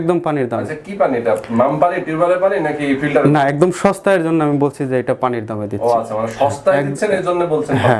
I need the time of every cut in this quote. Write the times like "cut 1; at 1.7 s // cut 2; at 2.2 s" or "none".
none